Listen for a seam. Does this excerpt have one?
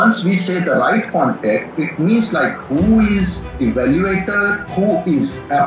yes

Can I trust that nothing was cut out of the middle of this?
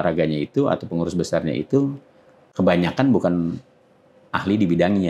no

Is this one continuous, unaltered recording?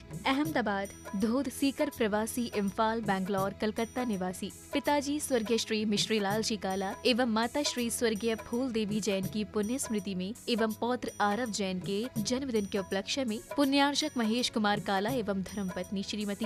yes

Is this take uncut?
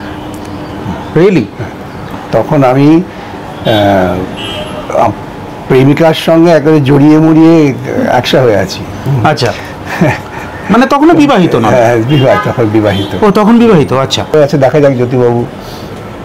no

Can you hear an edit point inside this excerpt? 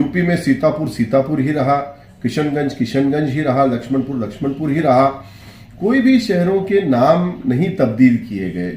no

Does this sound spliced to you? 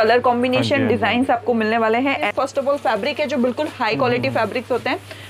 yes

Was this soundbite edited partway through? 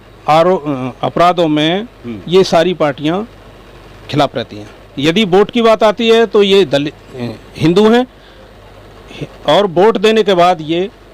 yes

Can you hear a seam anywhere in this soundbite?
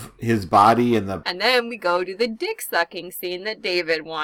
yes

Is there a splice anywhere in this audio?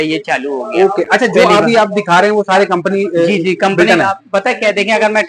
no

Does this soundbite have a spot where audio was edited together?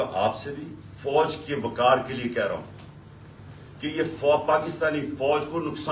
no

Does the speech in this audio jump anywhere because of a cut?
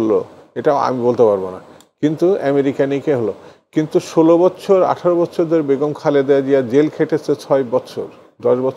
no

